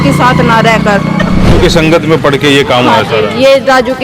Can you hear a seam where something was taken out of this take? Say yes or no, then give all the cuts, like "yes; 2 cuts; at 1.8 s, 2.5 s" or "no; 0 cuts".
yes; 1 cut; at 1.5 s